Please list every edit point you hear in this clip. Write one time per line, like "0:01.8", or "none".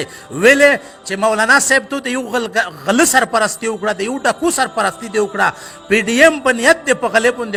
none